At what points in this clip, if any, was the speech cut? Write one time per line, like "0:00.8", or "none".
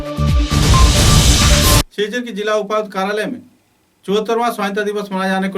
0:01.9